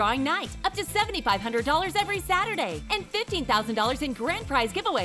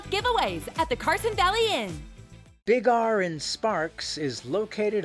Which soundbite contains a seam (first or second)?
second